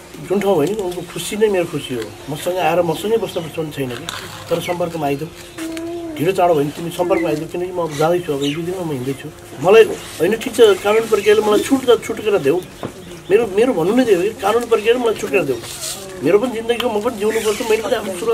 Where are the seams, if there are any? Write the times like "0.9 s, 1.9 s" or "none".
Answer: 9.5 s